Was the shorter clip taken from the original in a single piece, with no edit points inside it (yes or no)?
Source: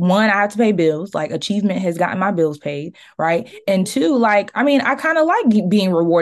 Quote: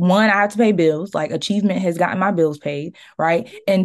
yes